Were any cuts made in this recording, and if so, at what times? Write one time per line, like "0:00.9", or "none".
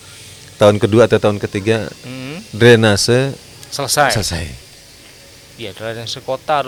none